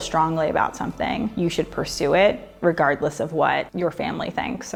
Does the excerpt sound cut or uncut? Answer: uncut